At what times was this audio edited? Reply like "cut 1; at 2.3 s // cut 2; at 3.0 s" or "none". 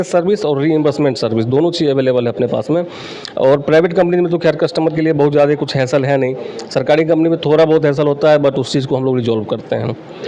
none